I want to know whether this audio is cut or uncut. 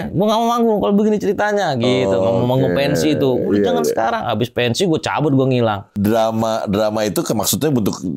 cut